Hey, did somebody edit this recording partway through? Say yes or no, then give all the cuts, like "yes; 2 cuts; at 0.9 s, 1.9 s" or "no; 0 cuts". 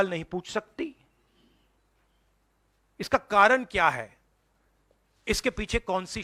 no; 0 cuts